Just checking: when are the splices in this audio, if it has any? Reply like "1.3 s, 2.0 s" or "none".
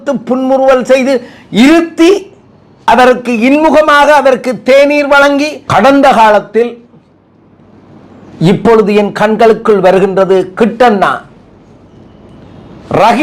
5.6 s